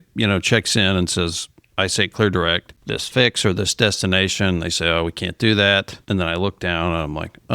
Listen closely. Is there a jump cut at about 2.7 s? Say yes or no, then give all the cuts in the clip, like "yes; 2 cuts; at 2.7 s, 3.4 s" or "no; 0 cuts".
yes; 2 cuts; at 2.7 s, 6.0 s